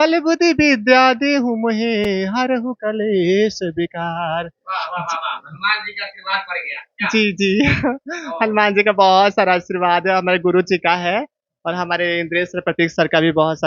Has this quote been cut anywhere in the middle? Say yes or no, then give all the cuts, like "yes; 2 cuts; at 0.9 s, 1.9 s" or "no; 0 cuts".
no; 0 cuts